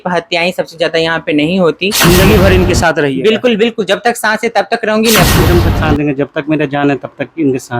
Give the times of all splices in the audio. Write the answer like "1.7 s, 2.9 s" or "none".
2.0 s, 5.3 s